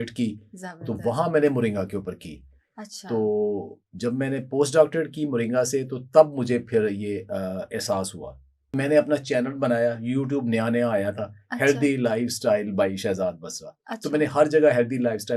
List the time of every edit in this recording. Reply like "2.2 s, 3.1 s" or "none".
8.7 s